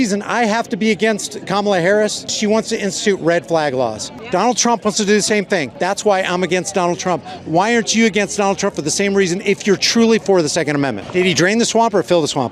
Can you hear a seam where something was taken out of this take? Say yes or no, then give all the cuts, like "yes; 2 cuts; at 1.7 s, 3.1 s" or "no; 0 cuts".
yes; 4 cuts; at 2.3 s, 4.1 s, 5.7 s, 11.0 s